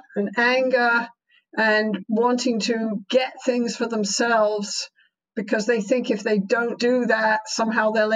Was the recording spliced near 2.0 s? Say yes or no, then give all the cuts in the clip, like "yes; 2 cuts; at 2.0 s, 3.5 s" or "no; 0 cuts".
yes; 3 cuts; at 2.0 s, 3.0 s, 6.7 s